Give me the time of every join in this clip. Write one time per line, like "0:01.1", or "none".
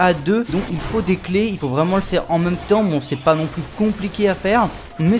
none